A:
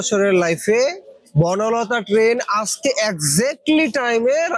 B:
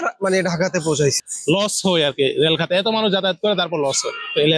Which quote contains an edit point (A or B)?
B